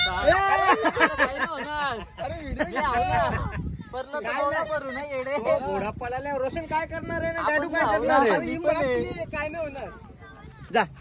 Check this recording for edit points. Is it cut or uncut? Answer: uncut